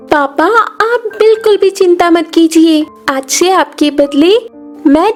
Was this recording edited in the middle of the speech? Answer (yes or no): no